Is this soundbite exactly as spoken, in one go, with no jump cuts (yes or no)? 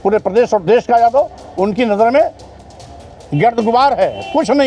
yes